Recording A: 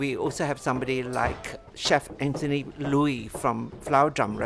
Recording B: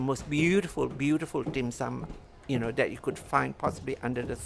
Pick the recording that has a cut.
A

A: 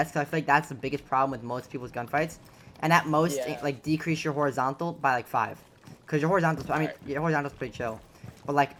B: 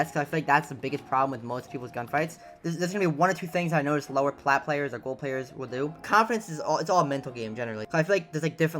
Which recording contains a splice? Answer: B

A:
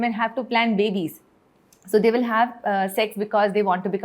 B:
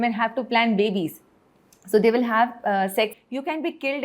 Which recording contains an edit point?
B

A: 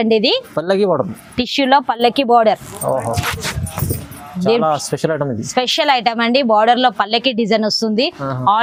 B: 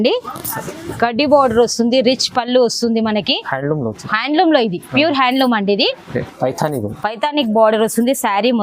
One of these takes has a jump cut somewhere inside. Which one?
B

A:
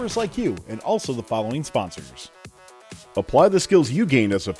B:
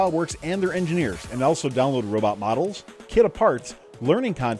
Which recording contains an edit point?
A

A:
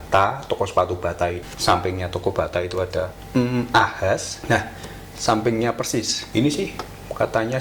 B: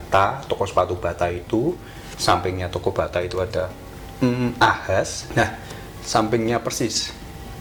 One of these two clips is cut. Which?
A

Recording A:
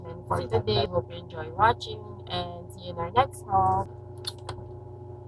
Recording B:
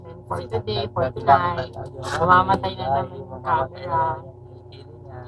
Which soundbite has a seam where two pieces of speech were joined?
A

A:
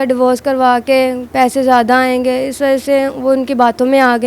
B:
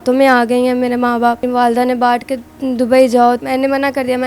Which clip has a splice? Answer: B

